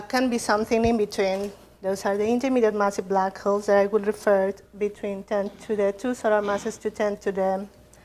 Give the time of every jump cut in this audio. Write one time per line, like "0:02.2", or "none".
0:04.7